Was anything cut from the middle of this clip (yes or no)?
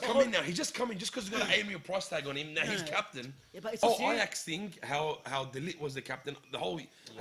yes